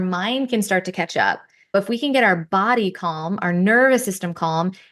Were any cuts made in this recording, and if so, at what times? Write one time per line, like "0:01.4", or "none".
0:01.7